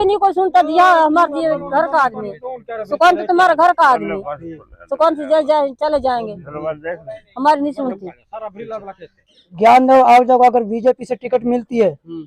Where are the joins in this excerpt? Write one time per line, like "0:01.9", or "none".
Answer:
0:09.1